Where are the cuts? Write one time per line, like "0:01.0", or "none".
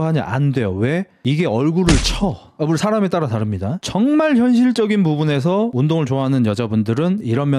0:03.7